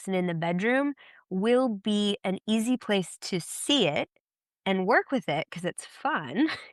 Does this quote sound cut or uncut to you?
uncut